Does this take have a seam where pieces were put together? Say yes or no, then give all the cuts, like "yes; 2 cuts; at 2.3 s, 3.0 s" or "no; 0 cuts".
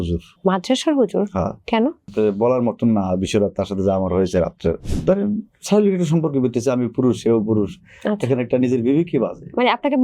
yes; 2 cuts; at 2.0 s, 4.8 s